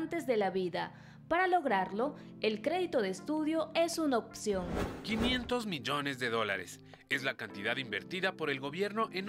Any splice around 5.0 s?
yes; 1 cut; at 5.0 s

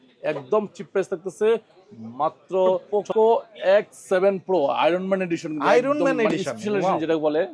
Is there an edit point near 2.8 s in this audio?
yes; 1 cut; at 2.8 s

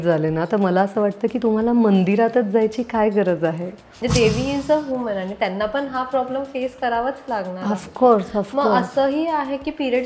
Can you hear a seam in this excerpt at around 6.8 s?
no; 1 cut; at 4.0 s

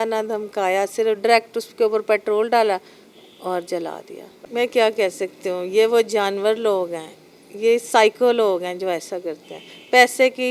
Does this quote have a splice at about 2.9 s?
no; 1 cut; at 4.2 s

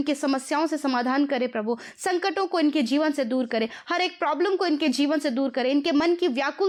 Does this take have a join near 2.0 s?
no; 0 cuts

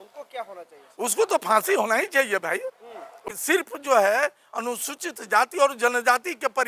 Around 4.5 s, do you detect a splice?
no; 1 cut; at 3.2 s

